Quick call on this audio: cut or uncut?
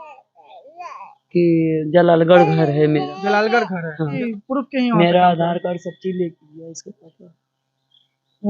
cut